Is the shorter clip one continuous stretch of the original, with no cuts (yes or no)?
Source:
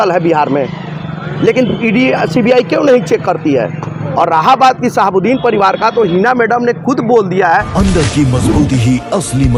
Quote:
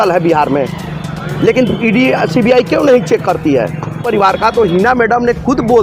no